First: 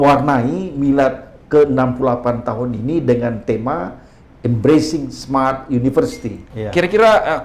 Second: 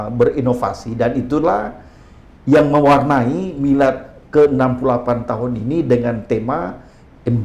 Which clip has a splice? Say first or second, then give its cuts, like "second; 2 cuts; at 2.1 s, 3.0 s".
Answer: first; 1 cut; at 6.5 s